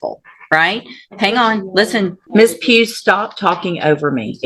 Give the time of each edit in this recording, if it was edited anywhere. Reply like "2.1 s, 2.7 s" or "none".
2.2 s

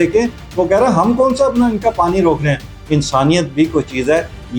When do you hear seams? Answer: 2.7 s

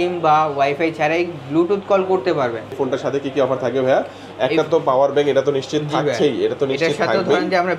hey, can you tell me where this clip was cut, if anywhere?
2.7 s

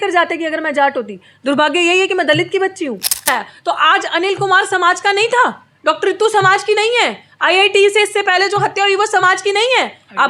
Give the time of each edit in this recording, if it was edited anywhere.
3.2 s

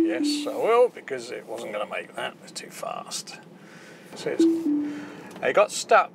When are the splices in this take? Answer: 4.1 s

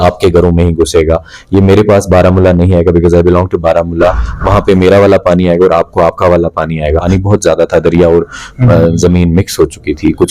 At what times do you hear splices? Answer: 7.1 s

